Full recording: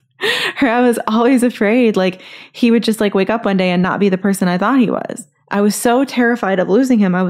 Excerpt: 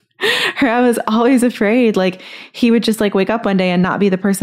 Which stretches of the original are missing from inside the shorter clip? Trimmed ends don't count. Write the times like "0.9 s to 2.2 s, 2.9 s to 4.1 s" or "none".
none